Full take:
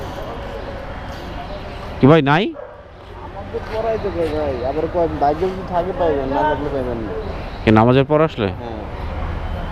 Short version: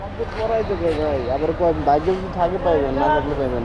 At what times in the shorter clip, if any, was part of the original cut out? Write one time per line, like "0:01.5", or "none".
none